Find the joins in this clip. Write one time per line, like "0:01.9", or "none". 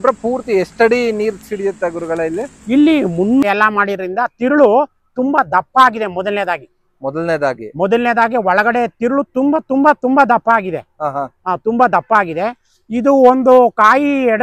0:03.4